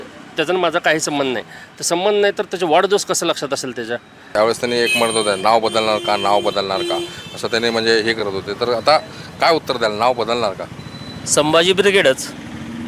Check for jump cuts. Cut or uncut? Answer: cut